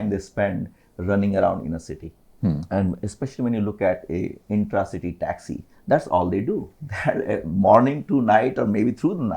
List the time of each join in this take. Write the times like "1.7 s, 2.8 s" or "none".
none